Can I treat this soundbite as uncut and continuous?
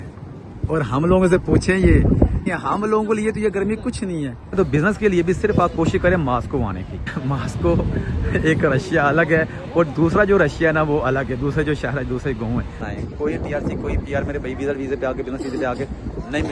no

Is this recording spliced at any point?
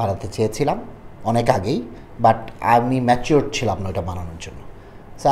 no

